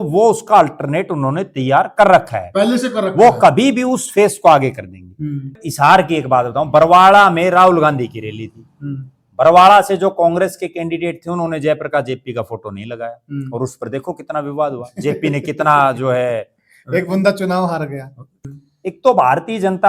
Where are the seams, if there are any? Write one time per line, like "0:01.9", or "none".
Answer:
0:05.6
0:18.4